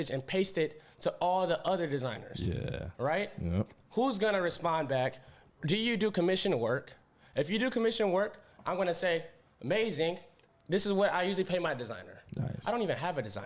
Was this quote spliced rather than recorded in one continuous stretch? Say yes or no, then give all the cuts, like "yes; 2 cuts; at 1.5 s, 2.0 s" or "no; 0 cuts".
no; 0 cuts